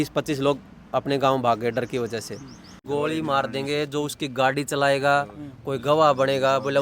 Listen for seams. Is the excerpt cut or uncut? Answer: cut